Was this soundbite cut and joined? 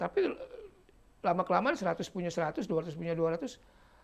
no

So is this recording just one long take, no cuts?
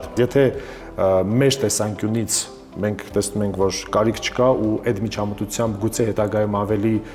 yes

